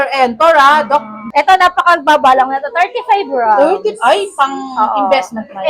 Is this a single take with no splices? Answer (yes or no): no